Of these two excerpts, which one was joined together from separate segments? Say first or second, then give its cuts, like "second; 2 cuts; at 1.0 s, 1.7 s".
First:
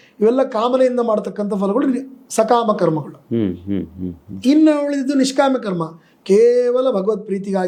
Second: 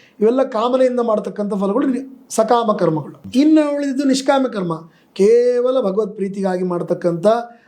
second; 1 cut; at 3.1 s